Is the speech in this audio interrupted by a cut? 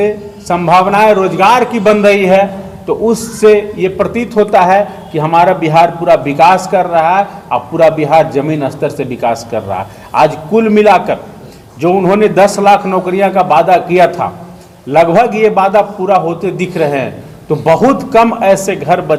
no; 0 cuts

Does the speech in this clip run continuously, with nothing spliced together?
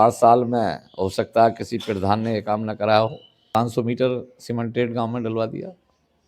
no; 1 cut; at 3.6 s

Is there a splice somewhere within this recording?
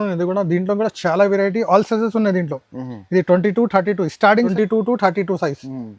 yes; 1 cut; at 4.5 s

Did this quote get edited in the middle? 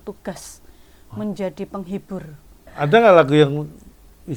yes; 1 cut; at 2.7 s

